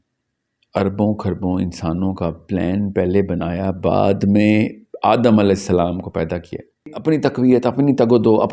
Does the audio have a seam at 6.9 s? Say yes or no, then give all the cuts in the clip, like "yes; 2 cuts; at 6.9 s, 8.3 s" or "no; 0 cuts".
yes; 1 cut; at 6.9 s